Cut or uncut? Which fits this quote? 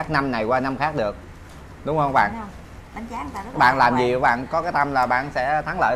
uncut